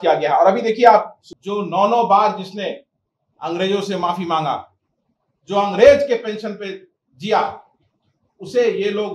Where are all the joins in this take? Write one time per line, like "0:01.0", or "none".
0:01.2